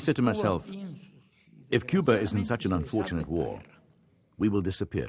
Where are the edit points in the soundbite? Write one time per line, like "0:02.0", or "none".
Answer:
none